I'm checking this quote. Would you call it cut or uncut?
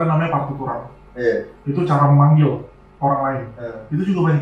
uncut